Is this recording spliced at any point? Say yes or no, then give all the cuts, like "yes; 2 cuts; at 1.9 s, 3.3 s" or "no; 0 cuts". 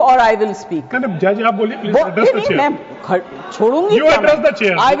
no; 0 cuts